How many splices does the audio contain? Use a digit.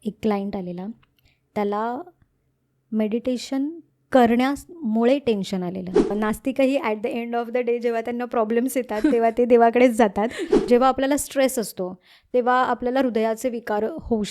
2